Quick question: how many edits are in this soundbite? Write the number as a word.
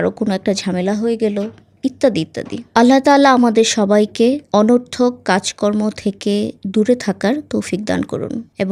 zero